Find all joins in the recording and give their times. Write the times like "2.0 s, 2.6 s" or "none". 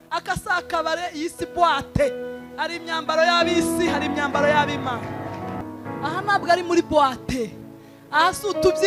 5.6 s